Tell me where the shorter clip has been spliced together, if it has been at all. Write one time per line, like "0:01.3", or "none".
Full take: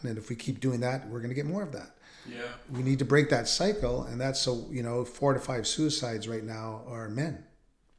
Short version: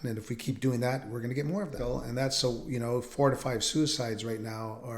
0:01.8